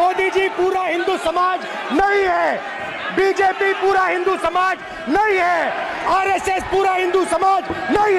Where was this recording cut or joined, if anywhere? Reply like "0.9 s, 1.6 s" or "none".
none